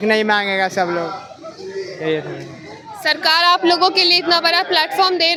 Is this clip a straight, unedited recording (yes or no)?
yes